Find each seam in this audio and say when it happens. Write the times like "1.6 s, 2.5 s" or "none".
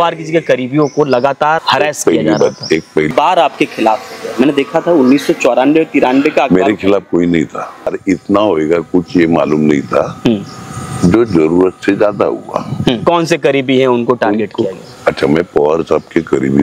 1.6 s, 3.1 s, 8.0 s, 13.0 s